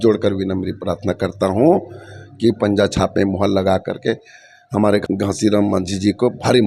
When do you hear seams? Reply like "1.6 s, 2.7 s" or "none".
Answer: 5.0 s